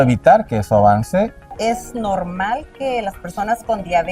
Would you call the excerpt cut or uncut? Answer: cut